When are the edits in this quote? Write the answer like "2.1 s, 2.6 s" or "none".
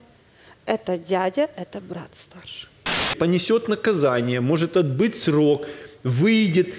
3.1 s